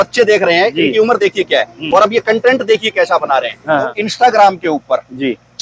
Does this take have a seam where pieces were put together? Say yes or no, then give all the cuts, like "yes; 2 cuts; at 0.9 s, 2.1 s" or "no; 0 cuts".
yes; 1 cut; at 3.9 s